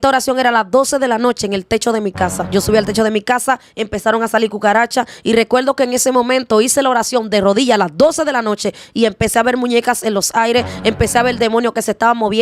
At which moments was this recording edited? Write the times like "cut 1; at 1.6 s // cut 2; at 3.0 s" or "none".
cut 1; at 2.4 s